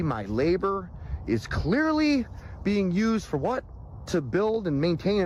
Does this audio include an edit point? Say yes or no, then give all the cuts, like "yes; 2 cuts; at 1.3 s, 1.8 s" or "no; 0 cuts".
no; 0 cuts